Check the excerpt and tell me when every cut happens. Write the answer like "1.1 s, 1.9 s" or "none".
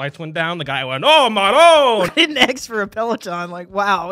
2.1 s